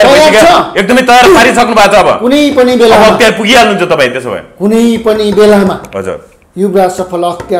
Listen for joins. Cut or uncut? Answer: uncut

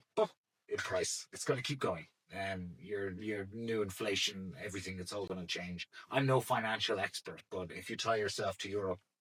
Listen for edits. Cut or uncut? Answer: uncut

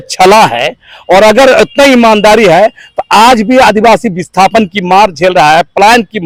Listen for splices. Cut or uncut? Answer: uncut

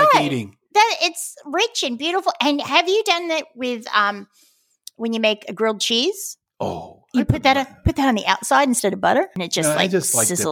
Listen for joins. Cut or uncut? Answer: cut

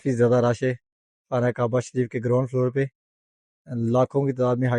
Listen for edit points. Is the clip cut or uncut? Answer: uncut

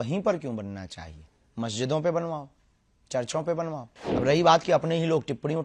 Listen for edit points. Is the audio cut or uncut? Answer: cut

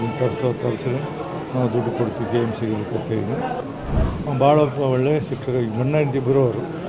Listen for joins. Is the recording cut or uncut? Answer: cut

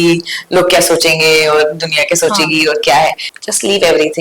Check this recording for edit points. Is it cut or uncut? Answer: cut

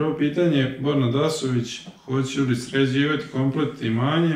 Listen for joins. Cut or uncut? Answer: uncut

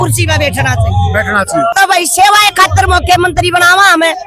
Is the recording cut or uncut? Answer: cut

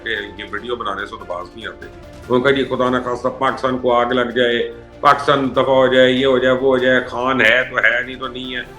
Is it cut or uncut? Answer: uncut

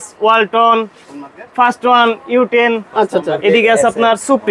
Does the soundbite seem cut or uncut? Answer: uncut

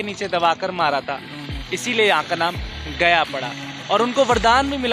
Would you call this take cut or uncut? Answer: uncut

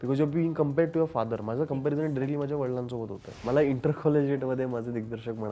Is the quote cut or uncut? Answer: cut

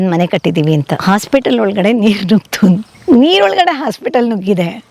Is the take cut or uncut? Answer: cut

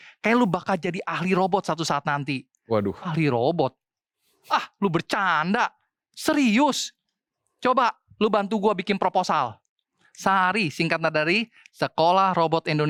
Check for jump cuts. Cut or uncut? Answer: uncut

